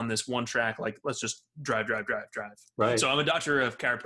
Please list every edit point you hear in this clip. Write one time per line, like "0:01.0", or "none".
0:03.0